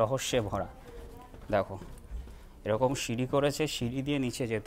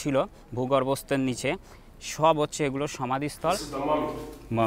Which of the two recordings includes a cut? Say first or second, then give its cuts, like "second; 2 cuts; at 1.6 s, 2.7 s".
second; 1 cut; at 3.7 s